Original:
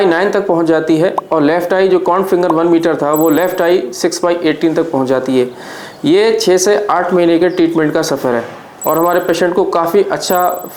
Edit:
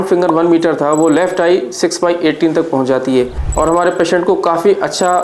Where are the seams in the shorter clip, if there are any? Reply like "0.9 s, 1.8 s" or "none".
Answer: 3.4 s